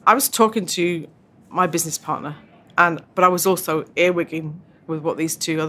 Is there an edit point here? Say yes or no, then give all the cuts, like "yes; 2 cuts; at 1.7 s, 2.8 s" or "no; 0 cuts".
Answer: no; 0 cuts